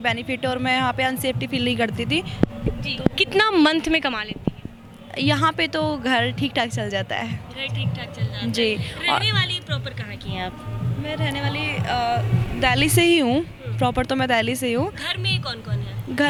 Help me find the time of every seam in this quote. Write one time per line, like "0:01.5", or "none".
none